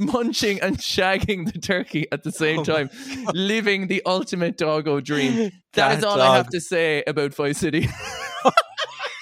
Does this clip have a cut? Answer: no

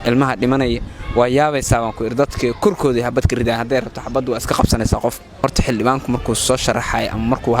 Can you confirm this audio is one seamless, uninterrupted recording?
no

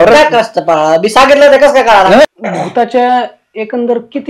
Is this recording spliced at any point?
yes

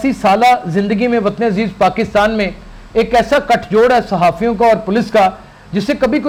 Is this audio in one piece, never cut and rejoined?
yes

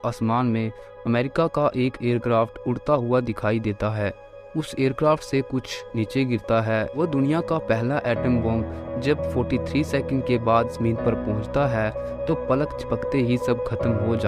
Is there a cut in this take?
yes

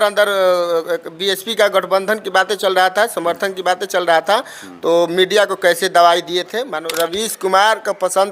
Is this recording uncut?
no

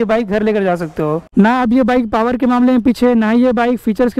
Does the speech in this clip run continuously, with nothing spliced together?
no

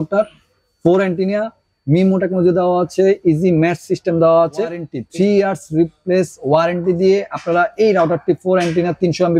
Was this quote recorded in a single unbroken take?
no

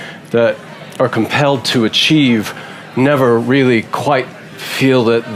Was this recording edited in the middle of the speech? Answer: no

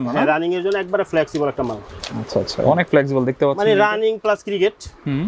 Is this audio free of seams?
yes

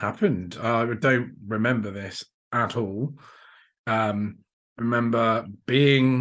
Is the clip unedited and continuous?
yes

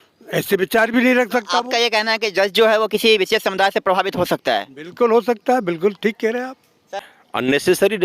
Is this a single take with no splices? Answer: no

